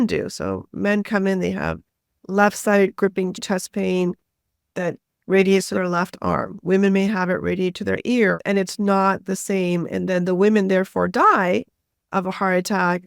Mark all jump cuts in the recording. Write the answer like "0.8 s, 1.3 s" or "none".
3.4 s, 8.4 s